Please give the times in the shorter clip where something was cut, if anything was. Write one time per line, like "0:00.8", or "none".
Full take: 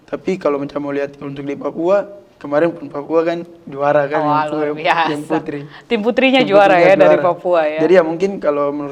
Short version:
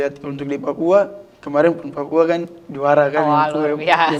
none